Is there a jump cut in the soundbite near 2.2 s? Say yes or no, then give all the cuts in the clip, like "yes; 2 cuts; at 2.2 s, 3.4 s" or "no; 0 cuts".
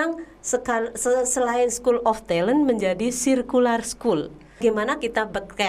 no; 1 cut; at 4.6 s